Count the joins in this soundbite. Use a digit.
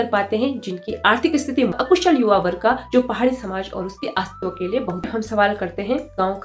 2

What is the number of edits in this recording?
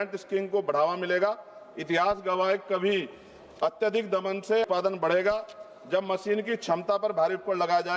1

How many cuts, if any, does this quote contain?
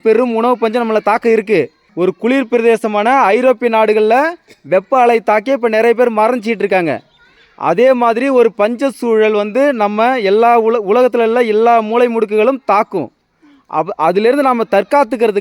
1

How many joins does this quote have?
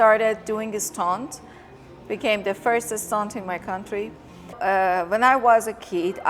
1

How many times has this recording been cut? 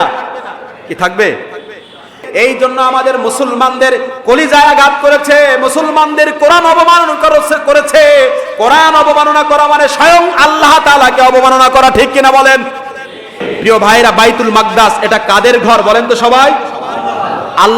2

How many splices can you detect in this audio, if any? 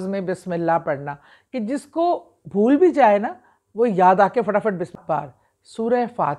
1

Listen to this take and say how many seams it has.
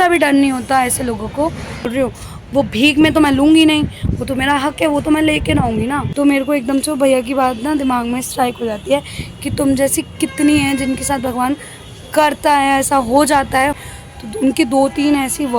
3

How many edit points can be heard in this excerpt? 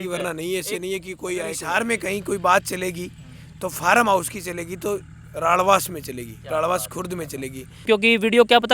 2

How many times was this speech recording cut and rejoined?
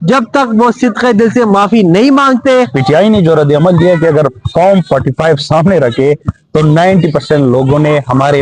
1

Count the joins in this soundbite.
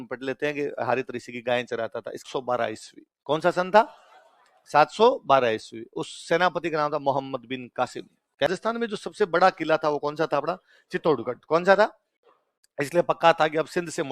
2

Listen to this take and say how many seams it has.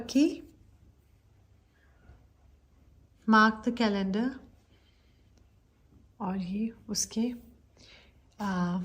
0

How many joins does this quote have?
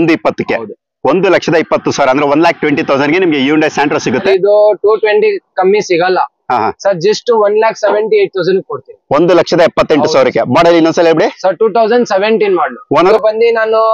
2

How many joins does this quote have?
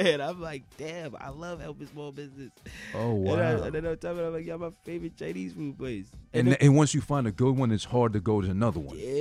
0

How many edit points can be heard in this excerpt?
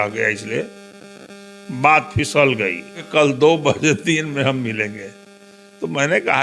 1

